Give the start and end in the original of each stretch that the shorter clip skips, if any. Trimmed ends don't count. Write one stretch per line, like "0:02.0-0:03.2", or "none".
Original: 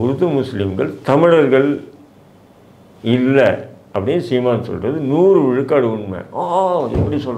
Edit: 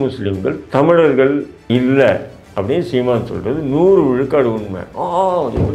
0:01.9-0:02.9